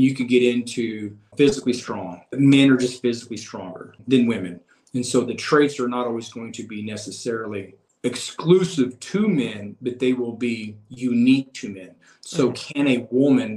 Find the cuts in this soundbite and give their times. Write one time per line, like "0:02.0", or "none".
0:01.3
0:02.3
0:04.0
0:07.8